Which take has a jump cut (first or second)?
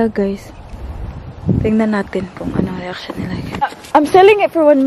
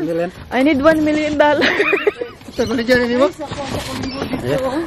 first